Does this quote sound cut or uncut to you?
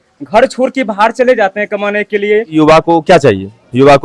cut